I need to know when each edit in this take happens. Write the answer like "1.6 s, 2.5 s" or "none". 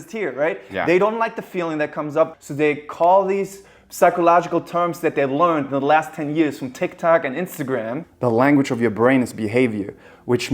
2.3 s, 8.0 s